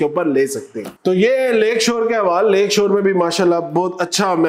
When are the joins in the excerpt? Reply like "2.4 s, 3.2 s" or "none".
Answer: none